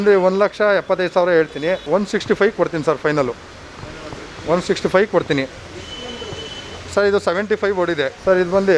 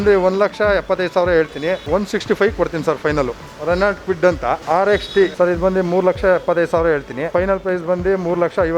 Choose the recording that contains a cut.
second; 4 cuts; at 3.5 s, 4.6 s, 5.3 s, 7.3 s

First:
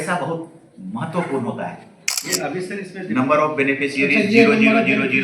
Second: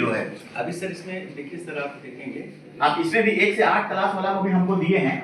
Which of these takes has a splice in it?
first; 1 cut; at 2.3 s

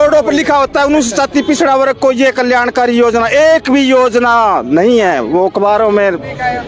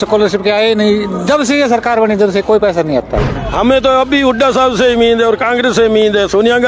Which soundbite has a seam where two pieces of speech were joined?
second; 1 cut; at 3.4 s

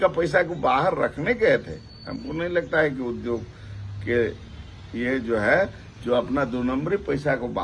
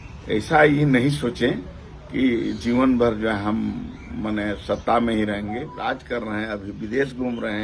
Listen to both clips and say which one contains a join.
second; 1 cut; at 5.7 s

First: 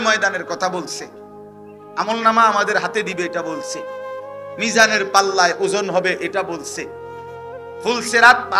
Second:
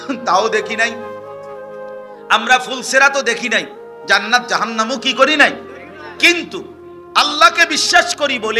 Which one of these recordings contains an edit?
second; 2 cuts; at 1.0 s, 2.3 s

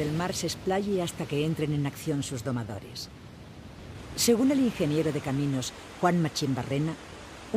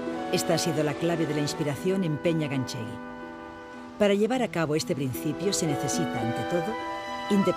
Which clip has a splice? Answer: second; 1 cut; at 5.8 s

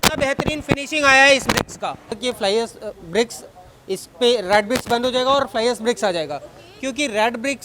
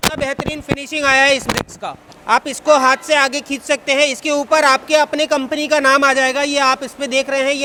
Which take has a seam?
first; 1 cut; at 2.1 s

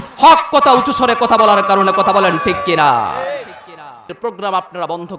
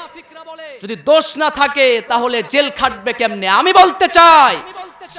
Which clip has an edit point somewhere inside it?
first; 1 cut; at 4.0 s

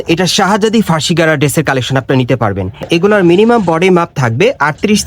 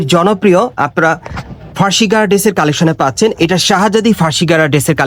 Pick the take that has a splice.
first; 1 cut; at 2.8 s

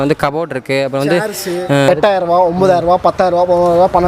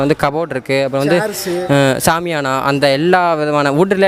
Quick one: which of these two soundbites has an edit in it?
first; 1 cut; at 1.9 s

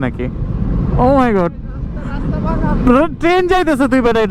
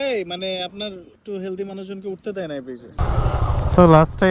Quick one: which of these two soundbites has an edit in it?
second; 2 cuts; at 1.2 s, 2.9 s

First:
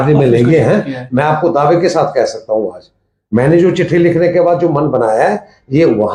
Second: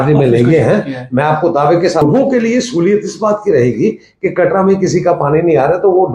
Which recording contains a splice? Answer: second; 1 cut; at 2.0 s

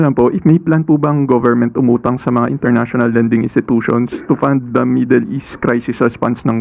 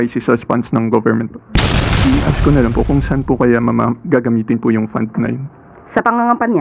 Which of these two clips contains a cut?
second; 1 cut; at 1.8 s

